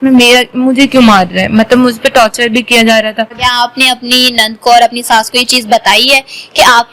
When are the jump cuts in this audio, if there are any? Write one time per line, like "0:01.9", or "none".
0:03.3